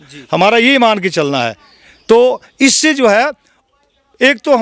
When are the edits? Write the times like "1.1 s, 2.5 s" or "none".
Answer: none